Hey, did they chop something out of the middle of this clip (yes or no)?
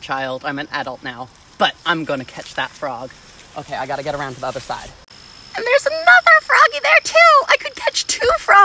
no